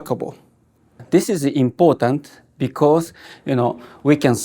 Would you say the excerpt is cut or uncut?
cut